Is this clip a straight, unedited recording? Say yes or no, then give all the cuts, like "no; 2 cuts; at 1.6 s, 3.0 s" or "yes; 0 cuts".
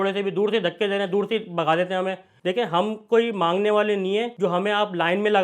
no; 1 cut; at 2.4 s